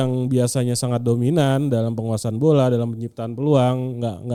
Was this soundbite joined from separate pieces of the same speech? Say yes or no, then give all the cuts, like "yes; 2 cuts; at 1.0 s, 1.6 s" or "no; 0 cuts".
no; 0 cuts